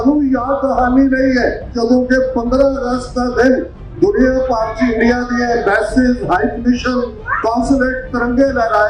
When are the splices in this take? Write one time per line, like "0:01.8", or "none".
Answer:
0:01.7